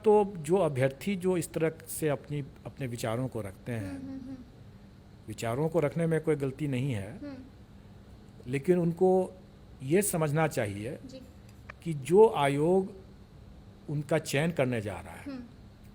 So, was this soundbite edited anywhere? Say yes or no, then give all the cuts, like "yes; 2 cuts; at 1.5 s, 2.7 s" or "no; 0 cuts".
no; 0 cuts